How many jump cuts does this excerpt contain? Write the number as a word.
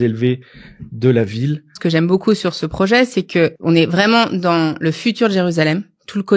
two